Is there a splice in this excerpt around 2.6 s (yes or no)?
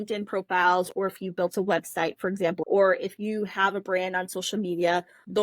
yes